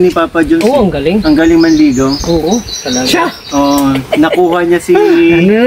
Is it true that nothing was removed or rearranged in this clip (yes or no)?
yes